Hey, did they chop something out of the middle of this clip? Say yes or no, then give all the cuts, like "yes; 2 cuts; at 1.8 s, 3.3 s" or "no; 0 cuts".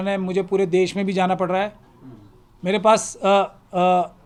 no; 0 cuts